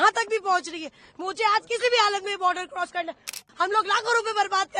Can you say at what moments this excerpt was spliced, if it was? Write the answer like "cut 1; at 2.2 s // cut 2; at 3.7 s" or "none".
cut 1; at 3.4 s